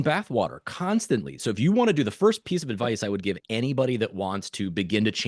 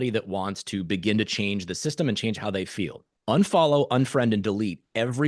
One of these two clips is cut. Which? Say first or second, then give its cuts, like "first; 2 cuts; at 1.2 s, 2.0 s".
second; 1 cut; at 3.1 s